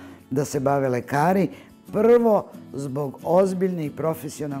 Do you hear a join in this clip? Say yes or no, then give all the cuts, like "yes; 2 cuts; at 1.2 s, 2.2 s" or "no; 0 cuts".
no; 0 cuts